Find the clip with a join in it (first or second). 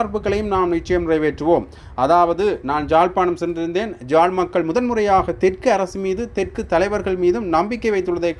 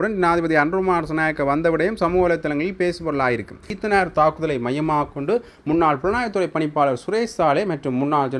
second